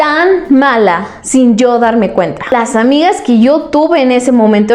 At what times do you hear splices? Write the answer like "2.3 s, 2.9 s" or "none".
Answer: 2.4 s

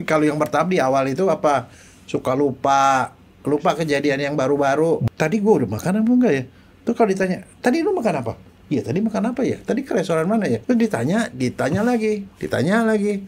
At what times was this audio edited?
5.1 s, 10.6 s

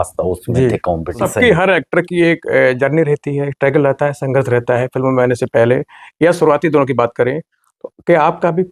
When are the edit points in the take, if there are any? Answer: 1.2 s

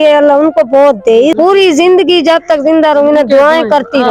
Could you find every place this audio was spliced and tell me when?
1.4 s

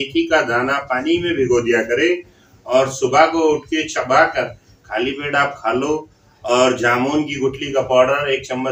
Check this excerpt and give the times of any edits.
none

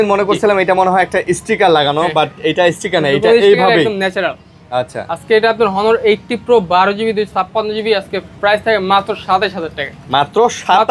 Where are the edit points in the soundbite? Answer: none

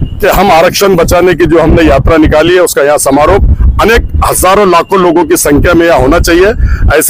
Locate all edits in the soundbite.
none

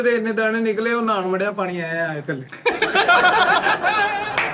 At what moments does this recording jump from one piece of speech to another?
none

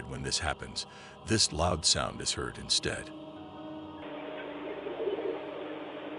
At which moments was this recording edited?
none

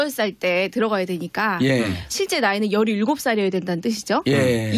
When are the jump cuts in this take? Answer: none

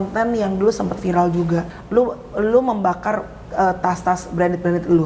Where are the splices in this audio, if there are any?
1.8 s

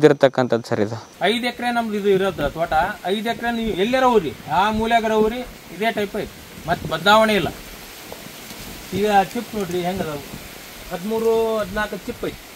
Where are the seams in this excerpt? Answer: 1.0 s

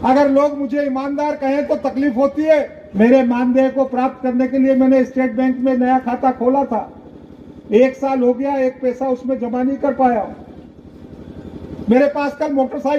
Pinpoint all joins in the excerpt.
2.8 s, 10.6 s

